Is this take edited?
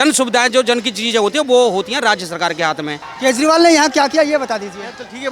yes; 1 cut; at 3.1 s

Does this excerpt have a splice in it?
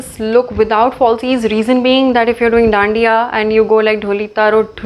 no; 0 cuts

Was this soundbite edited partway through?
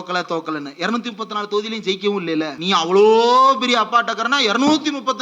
yes; 1 cut; at 2.6 s

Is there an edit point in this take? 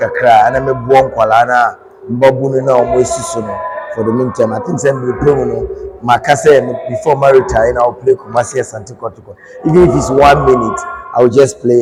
no; 0 cuts

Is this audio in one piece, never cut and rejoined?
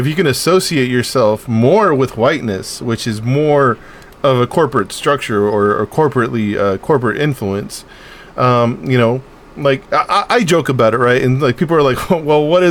yes; 0 cuts

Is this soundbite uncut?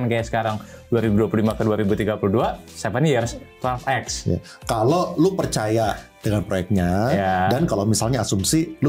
yes; 0 cuts

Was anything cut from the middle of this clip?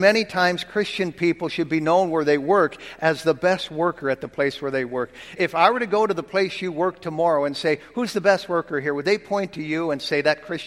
yes; 1 cut; at 5.3 s

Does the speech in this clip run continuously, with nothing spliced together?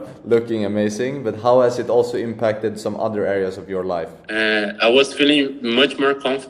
no; 1 cut; at 4.2 s

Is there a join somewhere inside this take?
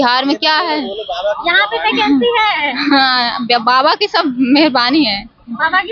no; 0 cuts

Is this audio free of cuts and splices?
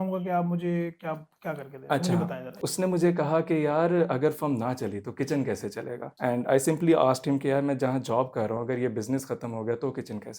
no; 2 cuts; at 2.7 s, 6.0 s

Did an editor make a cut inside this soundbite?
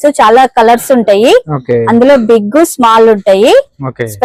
no; 0 cuts

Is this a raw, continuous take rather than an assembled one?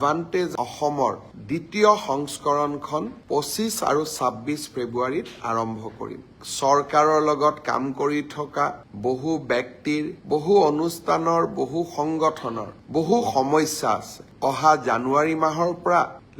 no; 1 cut; at 6.3 s

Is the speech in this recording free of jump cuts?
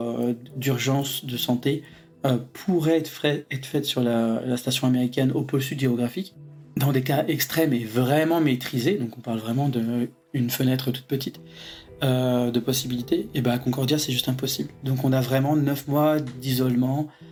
yes; 0 cuts

